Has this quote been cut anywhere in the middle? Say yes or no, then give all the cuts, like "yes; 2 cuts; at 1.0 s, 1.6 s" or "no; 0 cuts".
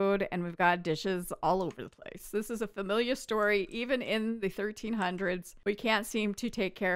no; 0 cuts